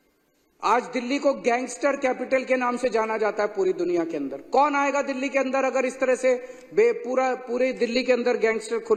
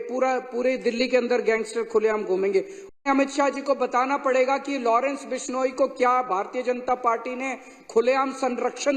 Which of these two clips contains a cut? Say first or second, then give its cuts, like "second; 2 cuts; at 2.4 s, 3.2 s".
second; 1 cut; at 2.9 s